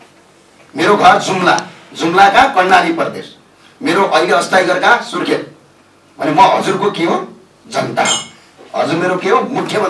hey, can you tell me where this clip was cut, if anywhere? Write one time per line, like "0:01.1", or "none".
none